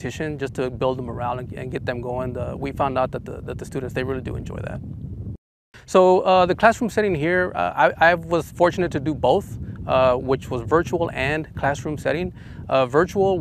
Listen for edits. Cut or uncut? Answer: uncut